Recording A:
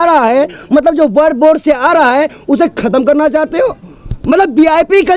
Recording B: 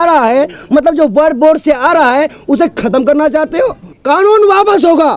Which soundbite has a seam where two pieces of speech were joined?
B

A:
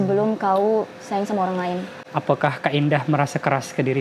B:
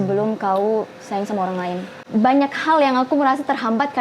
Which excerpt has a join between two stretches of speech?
B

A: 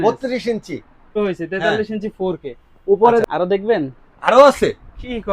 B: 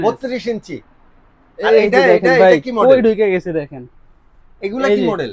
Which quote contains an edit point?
A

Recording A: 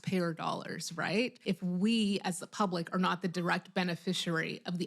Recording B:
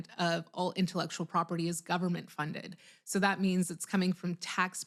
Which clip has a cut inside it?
A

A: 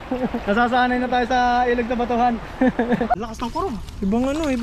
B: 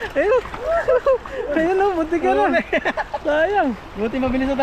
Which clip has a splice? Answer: A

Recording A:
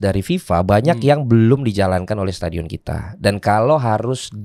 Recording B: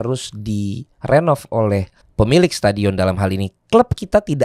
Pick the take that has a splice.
B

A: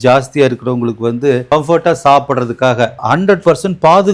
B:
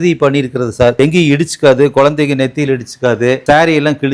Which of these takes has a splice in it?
A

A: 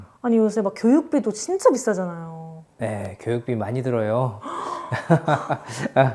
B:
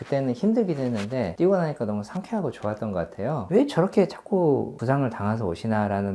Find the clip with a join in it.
B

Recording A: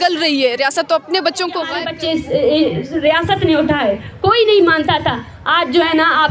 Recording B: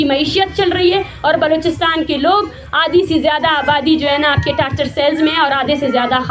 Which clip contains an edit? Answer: A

